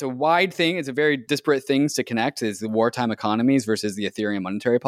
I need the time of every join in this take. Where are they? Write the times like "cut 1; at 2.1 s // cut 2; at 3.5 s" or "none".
cut 1; at 1.2 s